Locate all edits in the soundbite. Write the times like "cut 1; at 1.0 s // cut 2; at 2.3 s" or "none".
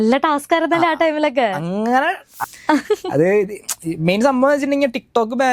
cut 1; at 2.3 s